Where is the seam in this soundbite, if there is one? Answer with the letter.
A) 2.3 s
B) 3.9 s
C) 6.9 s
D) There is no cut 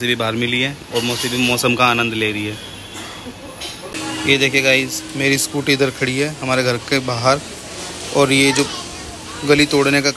B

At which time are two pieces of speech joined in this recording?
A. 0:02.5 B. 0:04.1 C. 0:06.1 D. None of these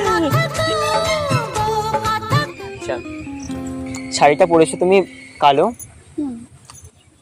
A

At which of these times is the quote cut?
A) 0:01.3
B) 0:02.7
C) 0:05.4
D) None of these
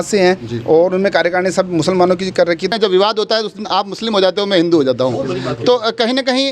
B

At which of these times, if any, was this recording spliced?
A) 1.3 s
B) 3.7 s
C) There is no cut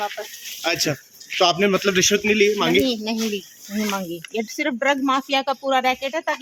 C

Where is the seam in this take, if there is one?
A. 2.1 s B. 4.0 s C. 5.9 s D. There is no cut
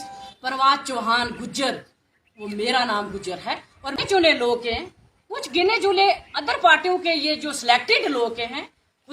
B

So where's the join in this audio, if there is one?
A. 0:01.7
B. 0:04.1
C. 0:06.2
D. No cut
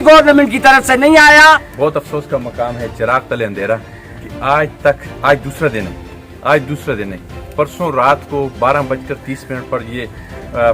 A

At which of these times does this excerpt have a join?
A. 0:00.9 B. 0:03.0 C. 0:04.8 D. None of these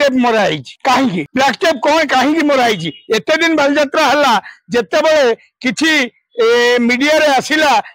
A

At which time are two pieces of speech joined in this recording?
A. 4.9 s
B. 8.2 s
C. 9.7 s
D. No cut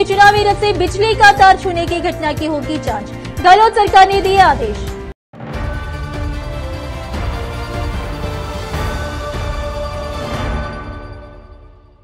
A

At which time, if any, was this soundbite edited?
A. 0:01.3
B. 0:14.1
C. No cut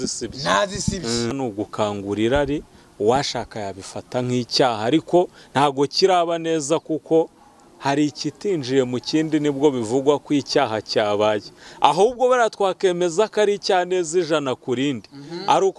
A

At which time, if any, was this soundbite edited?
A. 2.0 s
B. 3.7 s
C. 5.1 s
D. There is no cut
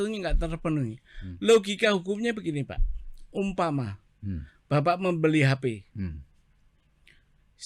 D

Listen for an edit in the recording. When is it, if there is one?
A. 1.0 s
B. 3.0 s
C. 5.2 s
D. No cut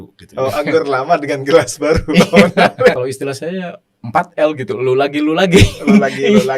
B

